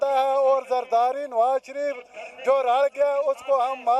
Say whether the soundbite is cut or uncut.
uncut